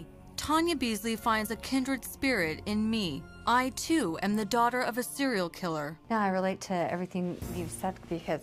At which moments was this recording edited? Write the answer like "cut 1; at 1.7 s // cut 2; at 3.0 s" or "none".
cut 1; at 6.8 s